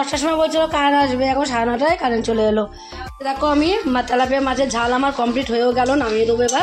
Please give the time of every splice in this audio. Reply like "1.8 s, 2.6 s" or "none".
3.1 s

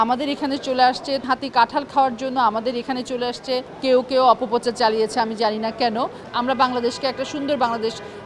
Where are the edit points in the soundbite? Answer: 1.2 s, 3.7 s, 6.3 s

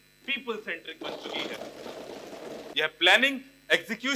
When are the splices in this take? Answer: 2.6 s

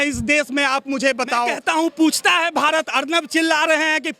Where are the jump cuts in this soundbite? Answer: 1.6 s

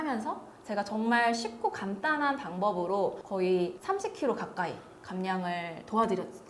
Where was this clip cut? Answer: 3.2 s, 3.8 s

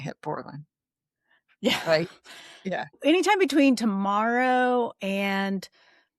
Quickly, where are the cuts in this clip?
3.0 s

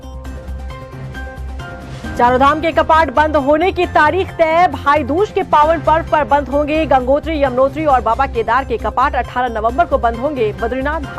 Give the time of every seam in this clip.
2.0 s

